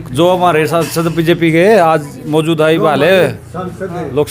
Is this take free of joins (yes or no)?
yes